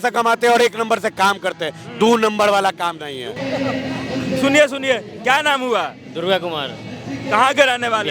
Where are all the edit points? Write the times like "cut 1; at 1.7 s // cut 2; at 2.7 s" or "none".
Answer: none